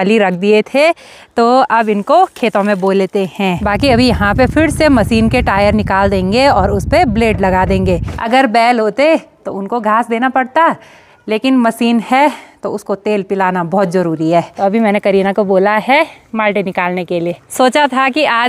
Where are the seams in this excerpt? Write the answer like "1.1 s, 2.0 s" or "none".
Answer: 3.7 s, 8.1 s, 14.5 s, 17.5 s